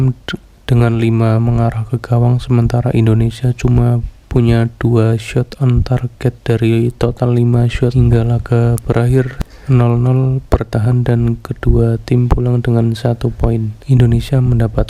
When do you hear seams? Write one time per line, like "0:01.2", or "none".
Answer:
0:07.9
0:09.4
0:13.7